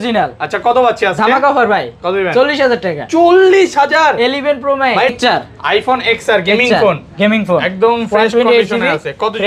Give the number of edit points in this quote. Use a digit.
1